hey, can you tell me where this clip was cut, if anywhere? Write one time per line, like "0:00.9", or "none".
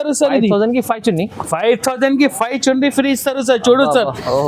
none